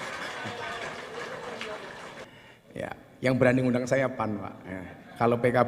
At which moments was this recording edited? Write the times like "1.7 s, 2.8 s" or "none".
2.3 s